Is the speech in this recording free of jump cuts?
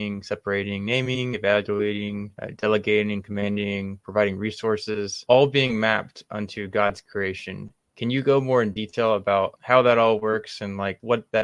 yes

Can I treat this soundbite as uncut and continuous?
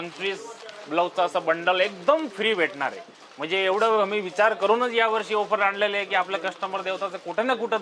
yes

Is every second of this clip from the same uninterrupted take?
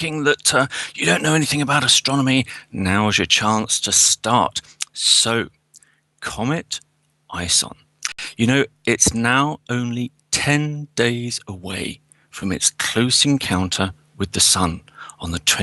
no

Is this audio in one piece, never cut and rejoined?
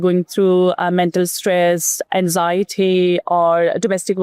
yes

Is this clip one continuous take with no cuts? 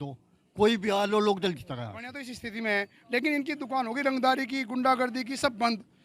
no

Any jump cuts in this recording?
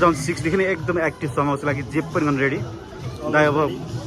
no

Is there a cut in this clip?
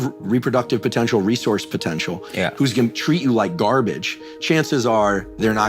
no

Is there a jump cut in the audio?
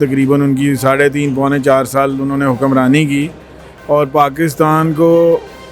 no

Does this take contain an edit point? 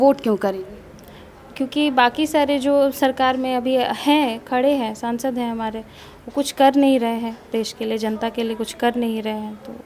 no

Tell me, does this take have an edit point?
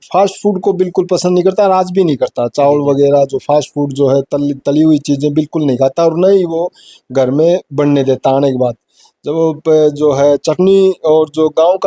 no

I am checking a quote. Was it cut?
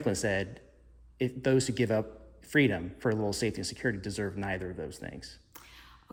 no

